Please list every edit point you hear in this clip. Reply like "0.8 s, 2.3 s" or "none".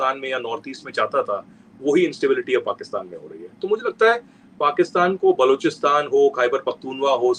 none